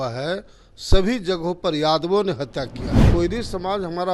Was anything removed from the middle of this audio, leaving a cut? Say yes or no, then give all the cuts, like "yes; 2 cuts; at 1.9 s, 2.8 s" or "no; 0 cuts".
yes; 1 cut; at 3.1 s